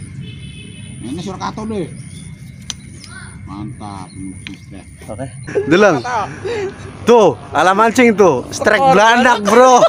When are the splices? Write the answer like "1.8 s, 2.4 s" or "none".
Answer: 5.4 s